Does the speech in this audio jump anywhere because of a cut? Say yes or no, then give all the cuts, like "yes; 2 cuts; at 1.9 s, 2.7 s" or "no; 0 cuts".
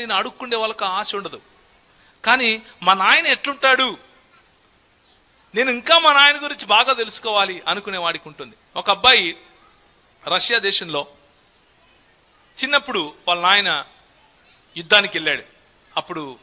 no; 0 cuts